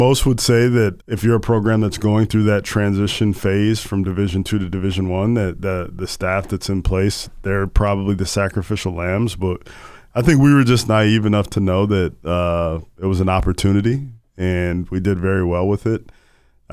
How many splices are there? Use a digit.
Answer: 1